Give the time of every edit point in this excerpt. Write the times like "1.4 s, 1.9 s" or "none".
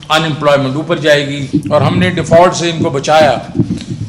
1.4 s